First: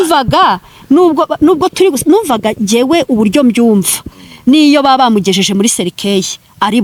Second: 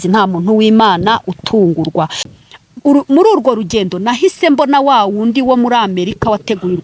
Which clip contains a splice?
second; 1 cut; at 2.3 s

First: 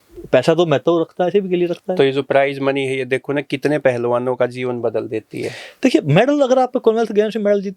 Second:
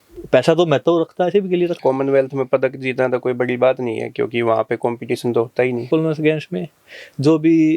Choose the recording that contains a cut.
second; 1 cut; at 1.8 s

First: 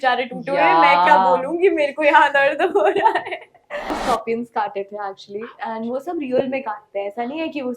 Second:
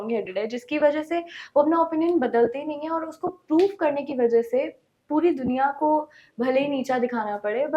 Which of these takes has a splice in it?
first; 1 cut; at 3.9 s

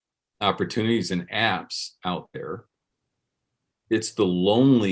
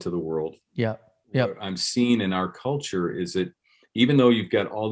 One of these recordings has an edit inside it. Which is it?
second; 1 cut; at 1.7 s

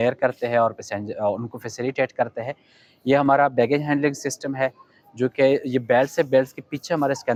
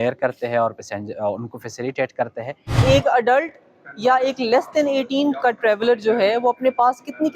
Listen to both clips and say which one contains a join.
second; 1 cut; at 2.7 s

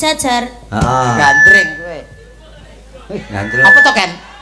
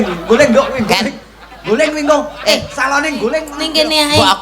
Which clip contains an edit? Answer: second; 1 cut; at 3.5 s

